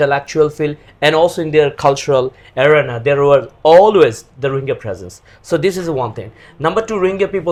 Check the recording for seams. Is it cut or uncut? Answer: uncut